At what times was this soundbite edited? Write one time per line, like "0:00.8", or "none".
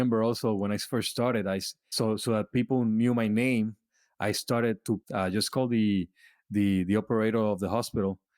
0:01.8
0:05.0